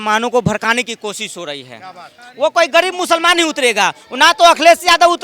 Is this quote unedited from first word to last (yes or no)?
no